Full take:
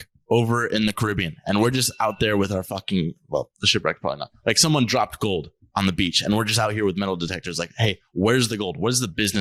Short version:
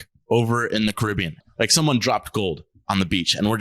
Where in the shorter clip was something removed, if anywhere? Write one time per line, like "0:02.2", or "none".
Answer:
0:01.4